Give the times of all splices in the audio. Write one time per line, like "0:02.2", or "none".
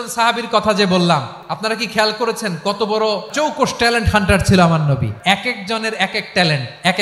0:01.4
0:03.3
0:05.1